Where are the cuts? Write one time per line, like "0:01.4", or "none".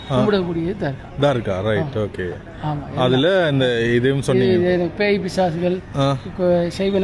none

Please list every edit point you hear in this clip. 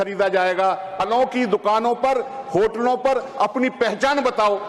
0:00.9

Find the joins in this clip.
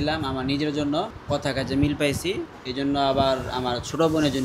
0:01.1
0:02.6

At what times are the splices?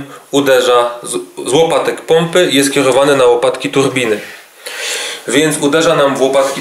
none

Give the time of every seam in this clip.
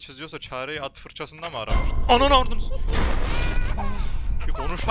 none

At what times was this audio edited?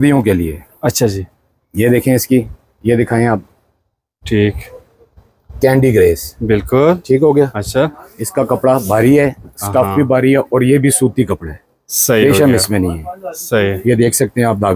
none

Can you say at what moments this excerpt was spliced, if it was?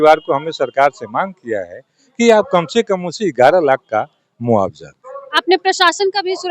none

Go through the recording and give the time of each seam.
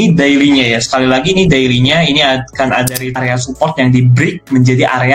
0:03.1

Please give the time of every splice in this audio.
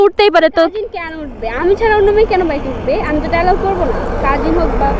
0:03.1

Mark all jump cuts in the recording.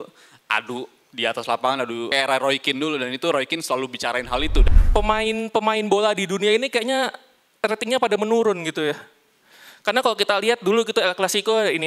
0:02.1
0:04.6

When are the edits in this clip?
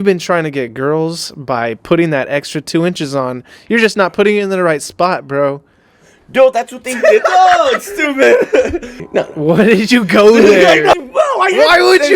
0:08.9
0:11.0

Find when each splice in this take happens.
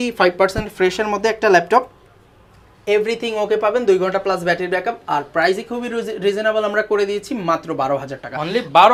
none

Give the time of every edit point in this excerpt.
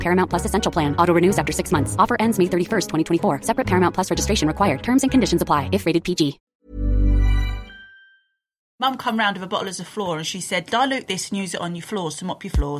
0:06.5
0:08.8

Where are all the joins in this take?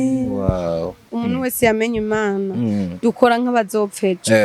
0:01.1

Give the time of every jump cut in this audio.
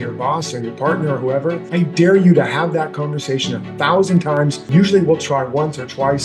0:01.6
0:04.7

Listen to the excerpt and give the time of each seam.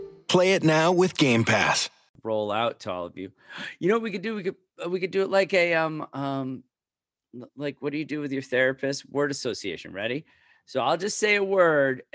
0:02.0

